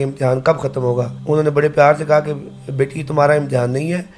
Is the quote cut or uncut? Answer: cut